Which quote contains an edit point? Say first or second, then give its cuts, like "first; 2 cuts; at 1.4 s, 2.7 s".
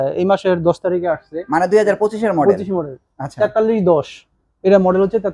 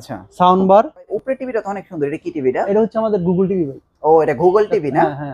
second; 1 cut; at 1.2 s